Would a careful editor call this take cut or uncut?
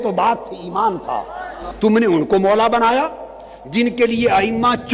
cut